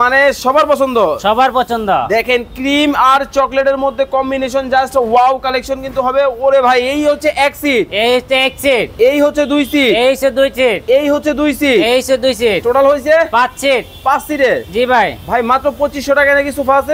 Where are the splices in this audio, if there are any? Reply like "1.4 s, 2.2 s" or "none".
none